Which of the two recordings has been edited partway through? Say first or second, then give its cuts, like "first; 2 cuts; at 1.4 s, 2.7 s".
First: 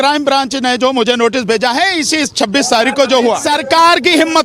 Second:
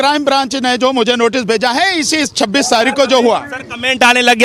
first; 1 cut; at 3.5 s